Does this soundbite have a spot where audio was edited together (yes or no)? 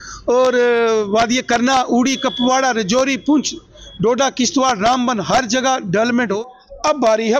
yes